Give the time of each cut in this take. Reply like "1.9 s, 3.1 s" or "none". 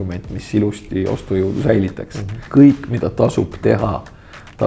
2.4 s